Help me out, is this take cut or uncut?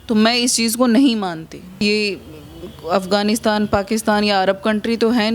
cut